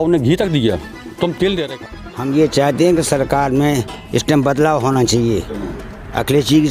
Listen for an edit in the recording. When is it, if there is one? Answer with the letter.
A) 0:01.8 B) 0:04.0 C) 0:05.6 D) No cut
A